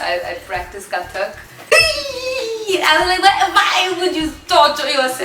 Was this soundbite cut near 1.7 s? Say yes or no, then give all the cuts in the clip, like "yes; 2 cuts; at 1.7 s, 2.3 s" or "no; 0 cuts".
yes; 1 cut; at 1.7 s